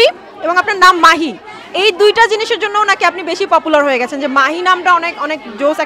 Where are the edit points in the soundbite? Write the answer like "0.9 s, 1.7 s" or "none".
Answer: none